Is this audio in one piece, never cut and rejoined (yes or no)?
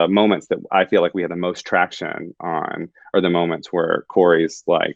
yes